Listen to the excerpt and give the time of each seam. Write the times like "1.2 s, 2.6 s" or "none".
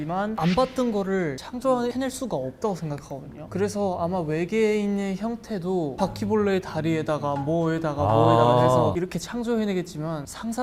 none